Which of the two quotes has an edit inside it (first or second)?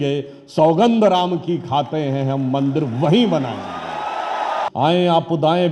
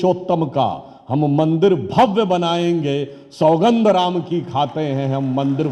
first